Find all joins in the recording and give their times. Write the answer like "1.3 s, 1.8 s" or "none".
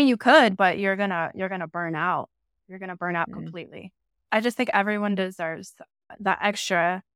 4.3 s, 6.1 s

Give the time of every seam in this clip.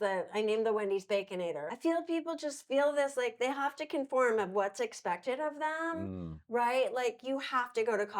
1.7 s

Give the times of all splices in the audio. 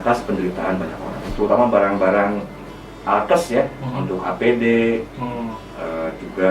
1.3 s

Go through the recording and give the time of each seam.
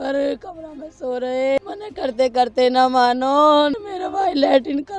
1.6 s, 3.8 s

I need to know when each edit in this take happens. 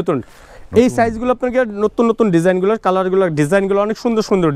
none

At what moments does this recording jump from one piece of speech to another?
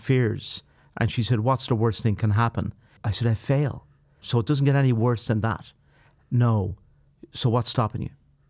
3.0 s, 4.2 s

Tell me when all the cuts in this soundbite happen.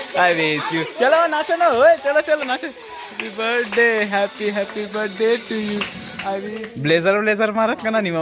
6.5 s

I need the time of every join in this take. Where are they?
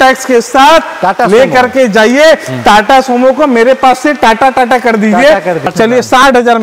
5.6 s

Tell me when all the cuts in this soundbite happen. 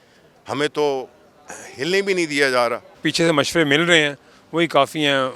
2.9 s

